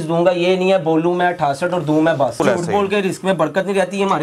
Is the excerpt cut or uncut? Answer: cut